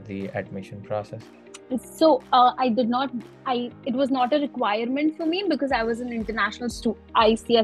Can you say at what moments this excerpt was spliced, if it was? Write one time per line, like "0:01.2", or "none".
none